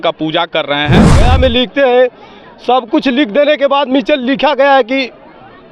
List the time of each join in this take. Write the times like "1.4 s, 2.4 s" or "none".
1.2 s